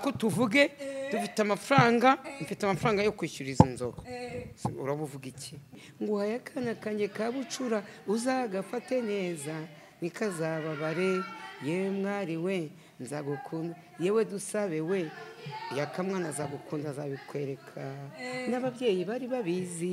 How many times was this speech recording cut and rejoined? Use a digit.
1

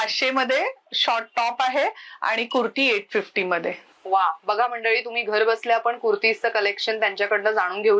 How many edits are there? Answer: 0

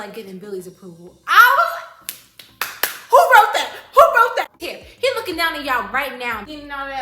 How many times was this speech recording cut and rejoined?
1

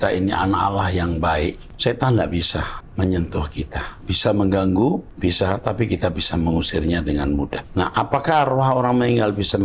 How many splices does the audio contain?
4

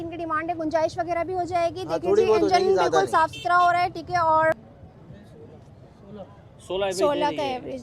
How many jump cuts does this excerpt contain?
1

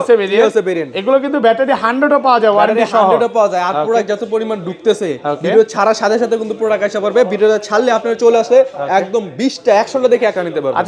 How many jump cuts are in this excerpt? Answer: 0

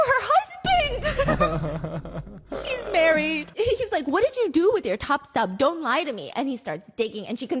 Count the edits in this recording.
1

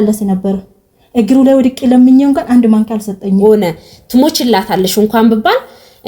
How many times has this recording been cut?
1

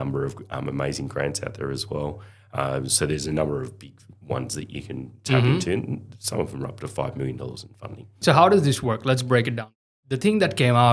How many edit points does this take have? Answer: 2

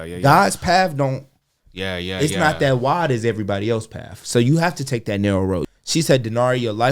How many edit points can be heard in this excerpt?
1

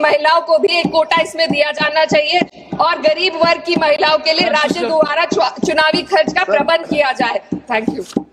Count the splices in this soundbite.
0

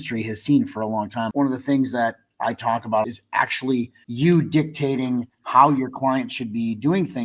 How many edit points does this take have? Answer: 3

